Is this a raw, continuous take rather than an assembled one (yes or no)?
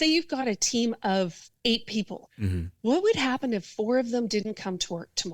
no